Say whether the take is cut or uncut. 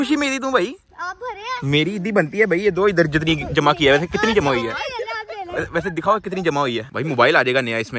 cut